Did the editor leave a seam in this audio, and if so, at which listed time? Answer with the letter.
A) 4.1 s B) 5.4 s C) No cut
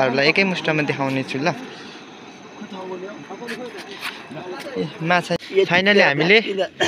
B